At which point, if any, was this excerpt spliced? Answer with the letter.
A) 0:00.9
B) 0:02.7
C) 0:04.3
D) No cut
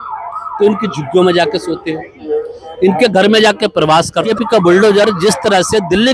C